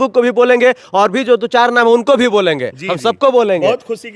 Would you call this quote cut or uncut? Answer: uncut